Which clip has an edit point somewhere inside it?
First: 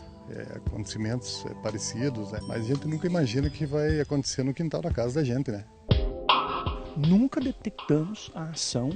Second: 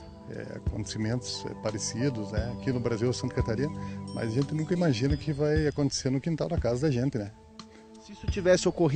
first; 2 cuts; at 2.4 s, 5.7 s

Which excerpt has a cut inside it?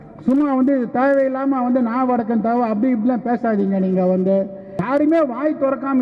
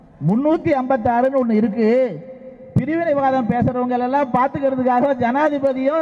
first; 1 cut; at 4.8 s

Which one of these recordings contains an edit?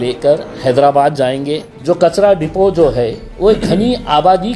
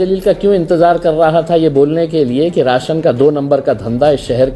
first; 1 cut; at 1.6 s

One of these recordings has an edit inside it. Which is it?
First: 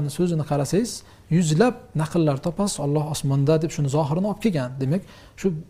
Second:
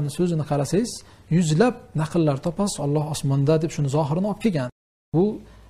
second; 1 cut; at 4.7 s

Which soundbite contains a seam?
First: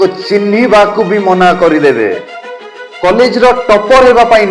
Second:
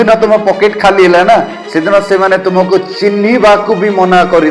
first; 1 cut; at 2.7 s

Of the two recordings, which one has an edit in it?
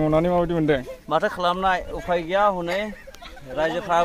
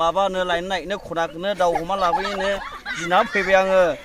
first; 1 cut; at 0.9 s

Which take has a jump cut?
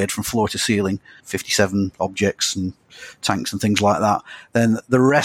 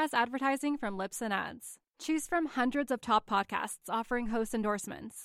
first; 1 cut; at 1.2 s

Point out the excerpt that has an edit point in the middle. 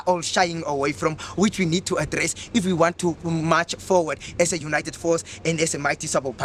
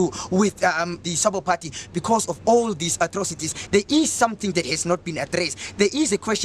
second; 2 cuts; at 1.0 s, 3.6 s

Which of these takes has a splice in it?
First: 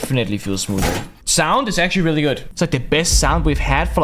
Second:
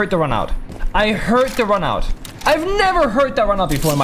first; 2 cuts; at 1.2 s, 2.5 s

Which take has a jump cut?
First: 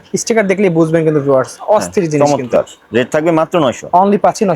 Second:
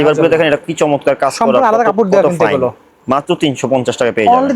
first; 1 cut; at 2.2 s

